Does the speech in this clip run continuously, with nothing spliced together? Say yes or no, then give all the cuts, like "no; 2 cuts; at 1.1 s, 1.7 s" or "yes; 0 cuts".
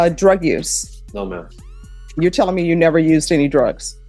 yes; 0 cuts